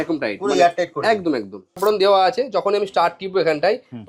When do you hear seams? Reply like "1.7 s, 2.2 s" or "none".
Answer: 1.8 s

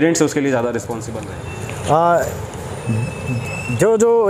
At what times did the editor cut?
1.0 s

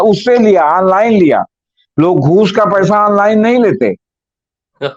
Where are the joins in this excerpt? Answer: none

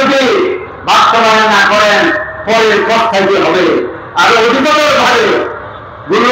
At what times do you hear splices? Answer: none

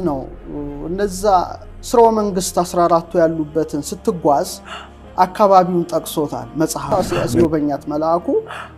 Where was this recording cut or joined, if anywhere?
6.9 s

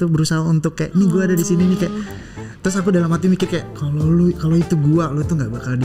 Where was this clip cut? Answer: none

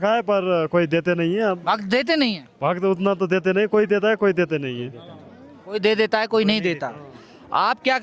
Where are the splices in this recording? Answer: none

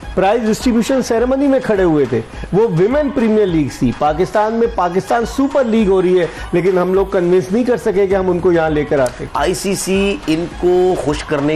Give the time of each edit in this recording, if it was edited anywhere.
9.2 s

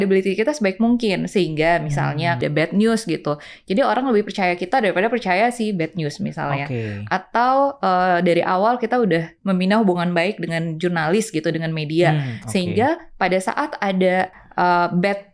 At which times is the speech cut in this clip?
2.4 s, 14.4 s

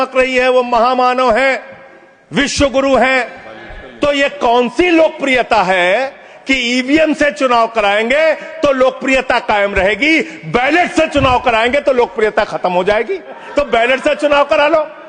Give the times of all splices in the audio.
6.2 s, 13.4 s

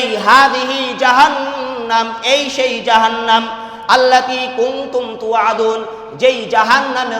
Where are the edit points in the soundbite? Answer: none

